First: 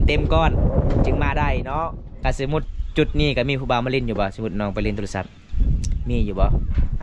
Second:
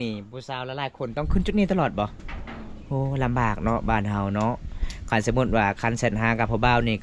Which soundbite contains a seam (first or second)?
first